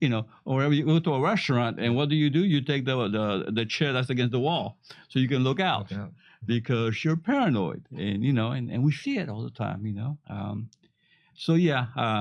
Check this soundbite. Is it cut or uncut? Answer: uncut